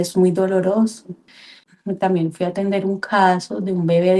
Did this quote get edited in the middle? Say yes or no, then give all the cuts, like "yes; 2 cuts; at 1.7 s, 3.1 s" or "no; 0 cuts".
yes; 1 cut; at 1.5 s